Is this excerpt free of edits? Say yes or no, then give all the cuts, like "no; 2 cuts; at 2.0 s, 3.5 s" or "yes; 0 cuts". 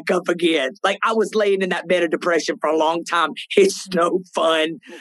no; 1 cut; at 1.0 s